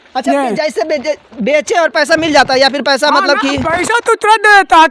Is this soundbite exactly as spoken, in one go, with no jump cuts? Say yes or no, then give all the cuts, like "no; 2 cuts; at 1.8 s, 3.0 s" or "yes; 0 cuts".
yes; 0 cuts